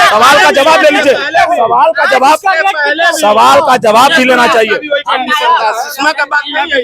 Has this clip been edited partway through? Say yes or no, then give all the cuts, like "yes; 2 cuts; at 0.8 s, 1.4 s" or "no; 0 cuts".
no; 0 cuts